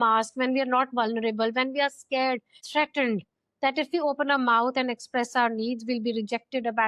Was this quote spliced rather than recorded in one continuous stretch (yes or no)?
yes